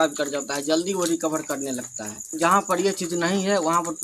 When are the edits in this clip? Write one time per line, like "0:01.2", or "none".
0:02.3